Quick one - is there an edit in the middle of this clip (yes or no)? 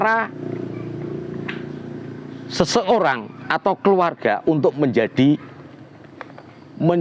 no